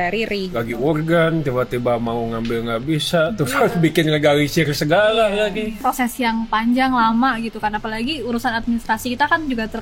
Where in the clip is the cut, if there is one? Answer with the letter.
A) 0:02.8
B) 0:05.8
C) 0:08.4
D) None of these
B